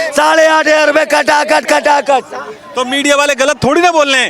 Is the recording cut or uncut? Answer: uncut